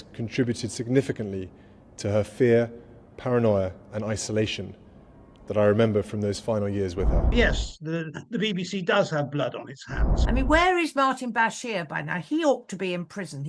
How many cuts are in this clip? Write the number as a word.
two